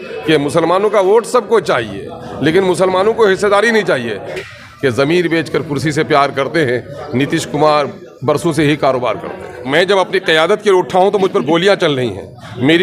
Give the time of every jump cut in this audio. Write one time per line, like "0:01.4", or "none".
0:04.3
0:09.5